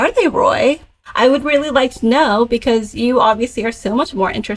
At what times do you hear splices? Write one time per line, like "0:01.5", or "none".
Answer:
0:01.0